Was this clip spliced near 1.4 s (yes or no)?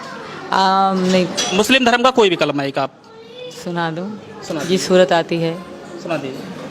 yes